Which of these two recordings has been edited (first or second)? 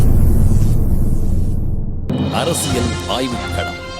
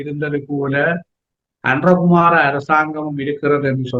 first